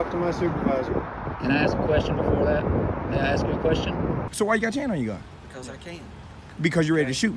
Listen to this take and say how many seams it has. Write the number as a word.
one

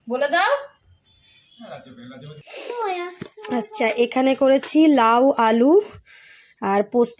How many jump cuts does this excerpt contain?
one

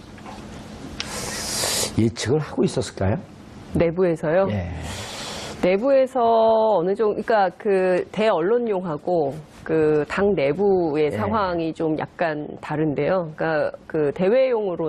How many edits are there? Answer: one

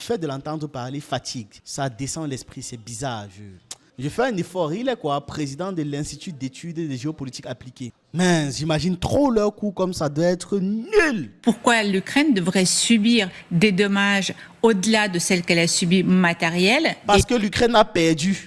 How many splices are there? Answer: two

